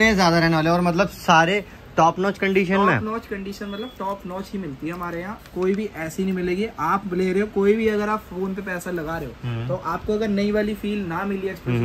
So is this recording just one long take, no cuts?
yes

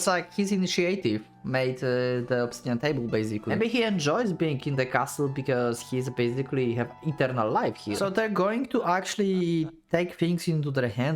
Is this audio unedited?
no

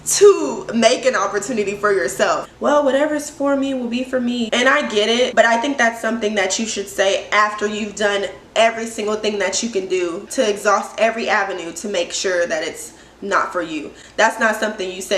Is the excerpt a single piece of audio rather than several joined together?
no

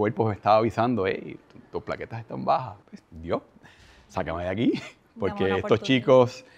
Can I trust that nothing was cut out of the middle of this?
no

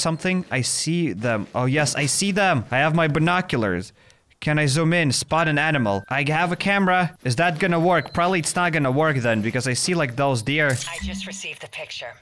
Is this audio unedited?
no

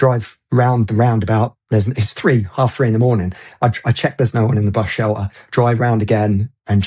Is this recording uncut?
yes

